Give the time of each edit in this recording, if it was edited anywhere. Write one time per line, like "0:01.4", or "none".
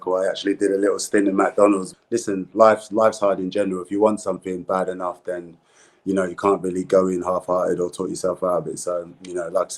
0:01.9